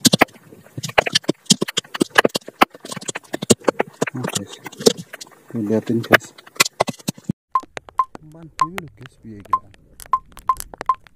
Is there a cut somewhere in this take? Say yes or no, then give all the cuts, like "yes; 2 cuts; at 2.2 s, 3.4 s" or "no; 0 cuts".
yes; 1 cut; at 7.4 s